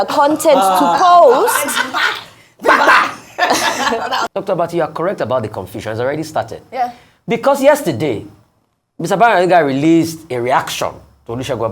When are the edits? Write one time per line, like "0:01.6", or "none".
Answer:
0:04.3